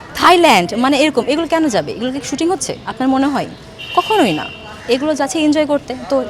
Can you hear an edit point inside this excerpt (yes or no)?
no